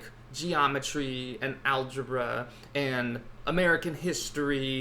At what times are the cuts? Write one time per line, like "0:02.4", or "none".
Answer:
0:03.4